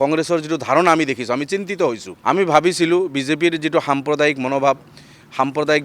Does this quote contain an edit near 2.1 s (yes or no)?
yes